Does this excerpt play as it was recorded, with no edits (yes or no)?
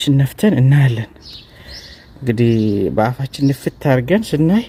yes